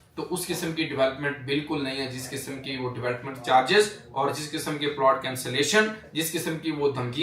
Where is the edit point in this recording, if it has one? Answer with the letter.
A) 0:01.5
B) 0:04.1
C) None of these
C